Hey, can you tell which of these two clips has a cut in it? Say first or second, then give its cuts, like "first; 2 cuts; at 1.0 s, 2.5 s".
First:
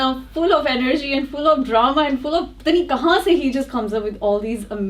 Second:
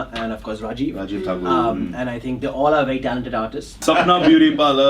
second; 1 cut; at 3.8 s